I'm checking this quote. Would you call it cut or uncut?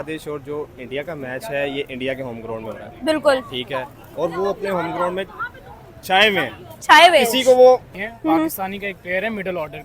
cut